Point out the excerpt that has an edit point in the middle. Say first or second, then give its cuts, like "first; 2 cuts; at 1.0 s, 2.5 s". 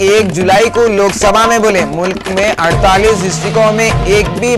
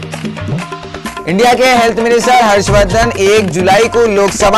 second; 1 cut; at 1.2 s